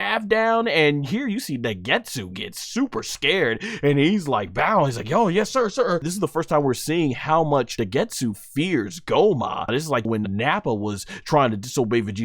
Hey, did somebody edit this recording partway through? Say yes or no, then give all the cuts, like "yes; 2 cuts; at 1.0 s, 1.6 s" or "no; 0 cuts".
yes; 3 cuts; at 6.1 s, 7.7 s, 10.1 s